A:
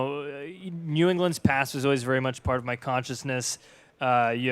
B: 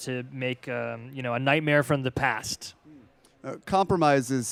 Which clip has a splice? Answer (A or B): A